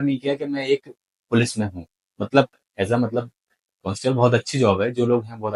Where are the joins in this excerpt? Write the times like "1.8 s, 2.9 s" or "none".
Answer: none